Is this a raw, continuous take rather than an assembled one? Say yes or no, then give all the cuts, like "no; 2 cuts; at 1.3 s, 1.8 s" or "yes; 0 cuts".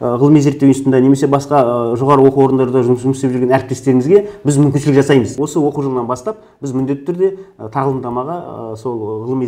no; 1 cut; at 5.3 s